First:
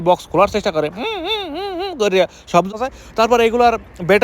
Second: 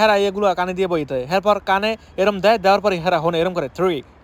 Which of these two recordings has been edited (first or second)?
first